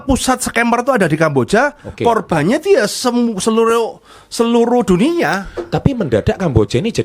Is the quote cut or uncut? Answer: uncut